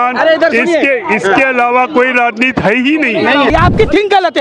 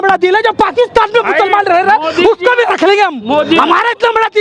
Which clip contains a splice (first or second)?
first